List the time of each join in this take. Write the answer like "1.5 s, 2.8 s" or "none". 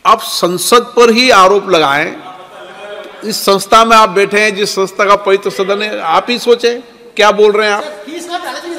none